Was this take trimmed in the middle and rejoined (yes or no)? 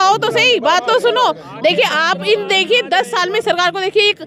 no